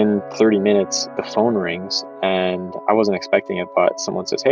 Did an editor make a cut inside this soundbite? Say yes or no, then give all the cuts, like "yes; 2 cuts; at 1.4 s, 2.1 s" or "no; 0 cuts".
no; 0 cuts